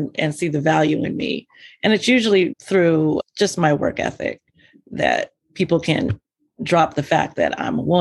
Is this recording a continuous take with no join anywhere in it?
no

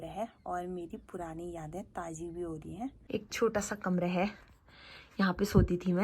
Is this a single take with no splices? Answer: no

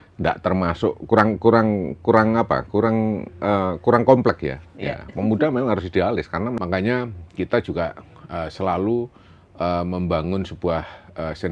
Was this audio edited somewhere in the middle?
yes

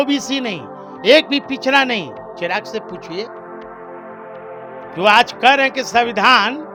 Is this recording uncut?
yes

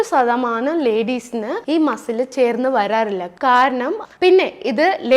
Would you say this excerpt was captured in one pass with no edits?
no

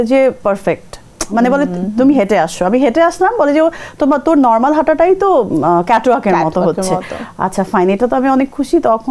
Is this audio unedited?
yes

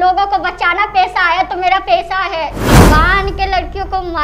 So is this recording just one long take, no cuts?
no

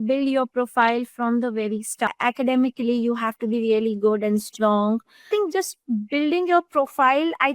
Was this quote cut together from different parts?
yes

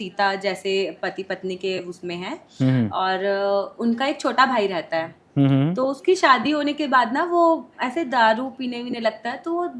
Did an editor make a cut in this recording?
no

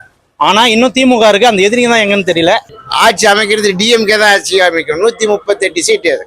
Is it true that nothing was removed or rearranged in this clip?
no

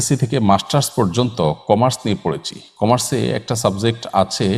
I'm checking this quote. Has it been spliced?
no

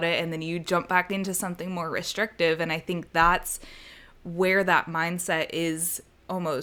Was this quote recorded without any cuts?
yes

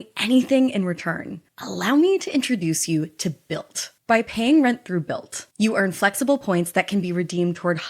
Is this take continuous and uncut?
no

